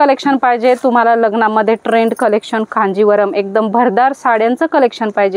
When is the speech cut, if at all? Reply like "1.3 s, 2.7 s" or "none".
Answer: none

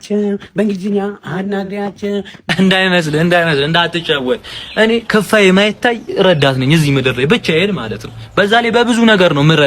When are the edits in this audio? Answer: 2.5 s

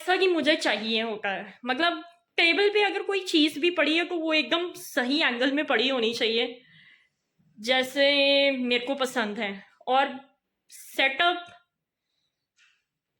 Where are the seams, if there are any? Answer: none

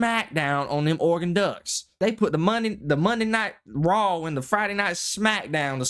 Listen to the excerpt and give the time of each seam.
1.9 s

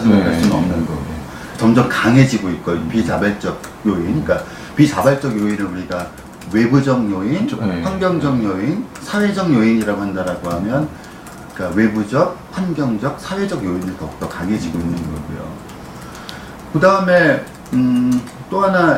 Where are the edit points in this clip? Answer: 14.1 s

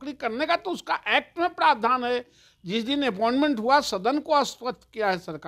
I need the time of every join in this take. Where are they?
none

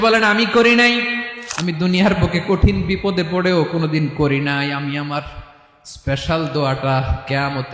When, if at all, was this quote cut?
1.3 s

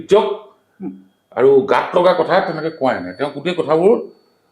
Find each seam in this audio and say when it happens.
none

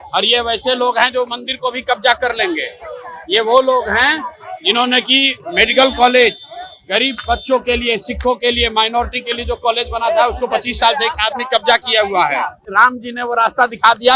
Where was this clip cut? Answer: 12.6 s

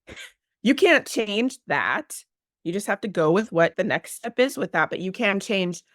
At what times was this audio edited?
3.7 s

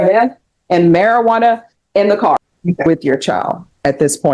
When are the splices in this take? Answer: 2.5 s

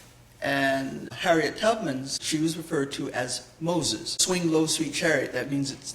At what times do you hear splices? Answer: 1.1 s, 2.2 s, 4.2 s

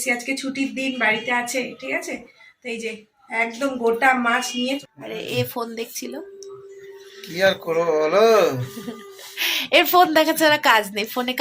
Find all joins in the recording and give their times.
4.8 s

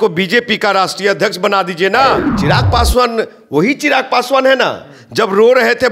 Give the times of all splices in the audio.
2.3 s

